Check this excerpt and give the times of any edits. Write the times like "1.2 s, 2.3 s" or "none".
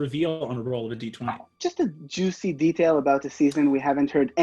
1.5 s